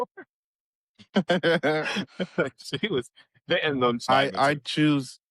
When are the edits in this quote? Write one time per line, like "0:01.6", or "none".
0:04.1